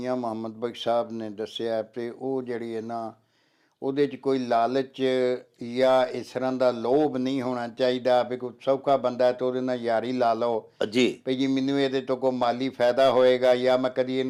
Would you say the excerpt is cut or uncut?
uncut